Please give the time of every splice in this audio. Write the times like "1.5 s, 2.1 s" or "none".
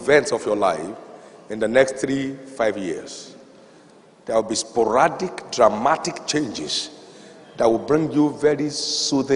none